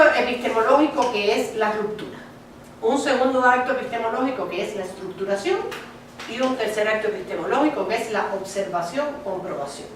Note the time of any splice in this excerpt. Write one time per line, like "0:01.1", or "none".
none